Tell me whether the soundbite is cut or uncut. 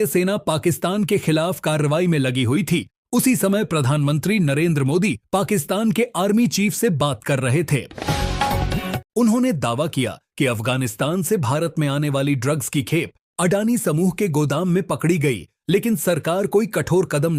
uncut